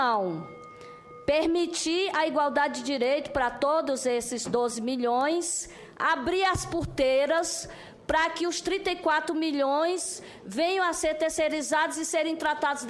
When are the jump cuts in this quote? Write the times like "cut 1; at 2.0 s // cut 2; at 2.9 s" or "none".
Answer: none